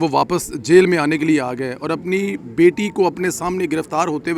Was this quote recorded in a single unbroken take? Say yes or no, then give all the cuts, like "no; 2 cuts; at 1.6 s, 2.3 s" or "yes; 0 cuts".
yes; 0 cuts